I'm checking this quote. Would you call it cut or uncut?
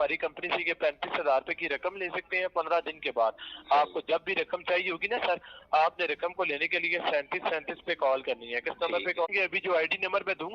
cut